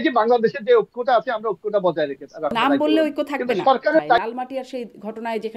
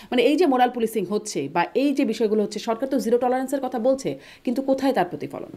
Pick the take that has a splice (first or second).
first